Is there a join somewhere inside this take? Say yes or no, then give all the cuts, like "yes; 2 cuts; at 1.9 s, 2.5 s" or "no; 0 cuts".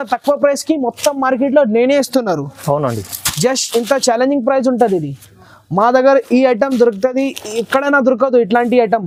no; 0 cuts